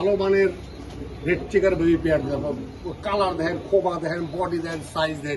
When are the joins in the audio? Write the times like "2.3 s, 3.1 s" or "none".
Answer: none